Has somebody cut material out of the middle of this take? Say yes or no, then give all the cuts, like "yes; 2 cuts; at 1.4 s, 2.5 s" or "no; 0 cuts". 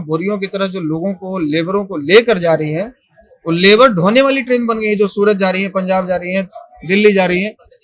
no; 0 cuts